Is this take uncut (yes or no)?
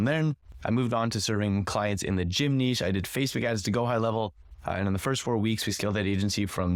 yes